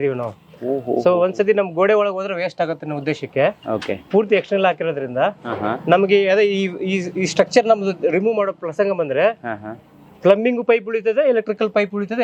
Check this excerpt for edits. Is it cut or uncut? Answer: uncut